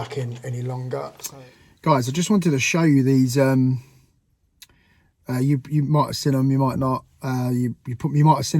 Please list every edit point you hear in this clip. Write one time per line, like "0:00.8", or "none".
0:01.2